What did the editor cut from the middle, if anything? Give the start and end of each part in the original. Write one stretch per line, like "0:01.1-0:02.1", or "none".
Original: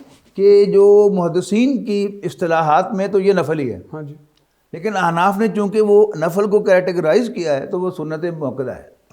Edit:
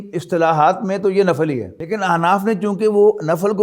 0:03.8-0:04.7